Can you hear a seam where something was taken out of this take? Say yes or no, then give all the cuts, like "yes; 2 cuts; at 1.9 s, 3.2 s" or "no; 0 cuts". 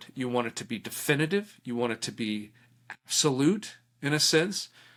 no; 0 cuts